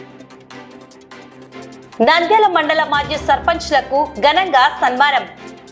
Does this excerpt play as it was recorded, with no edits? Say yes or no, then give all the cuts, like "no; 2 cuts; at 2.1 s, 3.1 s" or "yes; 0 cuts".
no; 1 cut; at 1.9 s